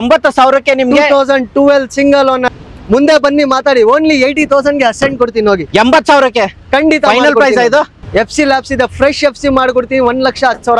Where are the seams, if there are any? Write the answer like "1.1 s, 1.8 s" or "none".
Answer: 2.4 s, 8.0 s